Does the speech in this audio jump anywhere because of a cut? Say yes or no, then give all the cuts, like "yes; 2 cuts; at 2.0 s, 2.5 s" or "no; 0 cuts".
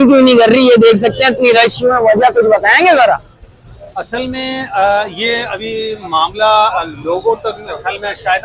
no; 0 cuts